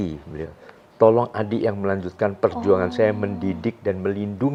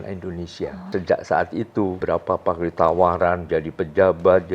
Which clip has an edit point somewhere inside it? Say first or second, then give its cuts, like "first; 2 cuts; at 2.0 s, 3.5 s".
second; 2 cuts; at 0.9 s, 2.0 s